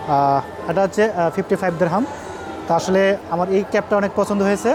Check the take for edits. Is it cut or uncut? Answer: uncut